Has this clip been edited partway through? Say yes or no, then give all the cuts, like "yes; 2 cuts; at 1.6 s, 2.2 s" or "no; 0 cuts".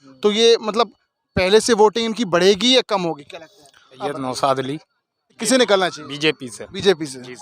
yes; 2 cuts; at 3.8 s, 5.4 s